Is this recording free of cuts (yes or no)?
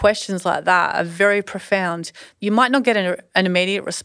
no